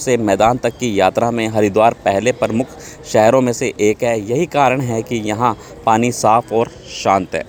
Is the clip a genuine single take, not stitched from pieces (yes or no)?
yes